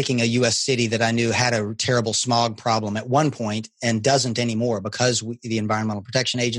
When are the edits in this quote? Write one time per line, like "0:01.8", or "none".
none